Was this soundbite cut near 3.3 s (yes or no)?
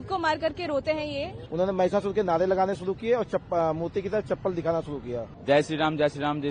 no